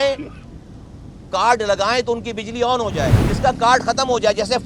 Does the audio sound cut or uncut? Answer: cut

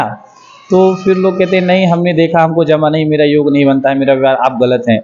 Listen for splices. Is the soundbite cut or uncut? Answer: uncut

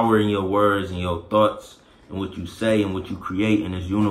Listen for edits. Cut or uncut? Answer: uncut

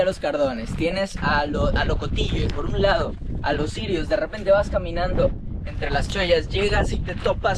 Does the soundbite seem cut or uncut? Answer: uncut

